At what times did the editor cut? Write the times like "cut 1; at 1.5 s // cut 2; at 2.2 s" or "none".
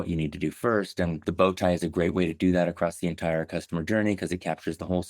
cut 1; at 1.2 s